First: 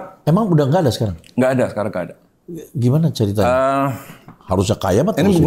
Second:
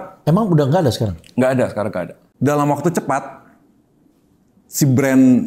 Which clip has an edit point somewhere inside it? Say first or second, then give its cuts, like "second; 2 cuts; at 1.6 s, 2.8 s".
second; 1 cut; at 2.2 s